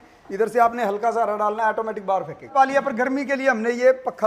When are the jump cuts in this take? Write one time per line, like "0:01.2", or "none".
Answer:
0:02.5